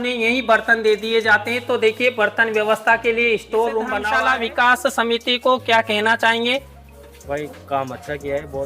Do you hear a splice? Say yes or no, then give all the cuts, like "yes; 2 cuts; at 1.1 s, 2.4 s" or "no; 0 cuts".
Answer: yes; 1 cut; at 4.1 s